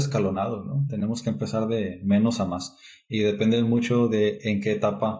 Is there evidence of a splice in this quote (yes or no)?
no